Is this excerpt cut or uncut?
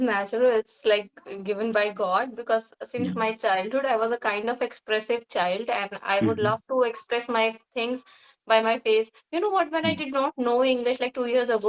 uncut